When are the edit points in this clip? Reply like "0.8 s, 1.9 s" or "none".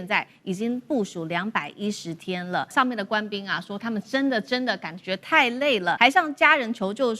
2.7 s, 6.0 s